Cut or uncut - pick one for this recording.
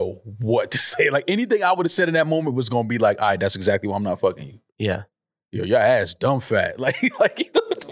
uncut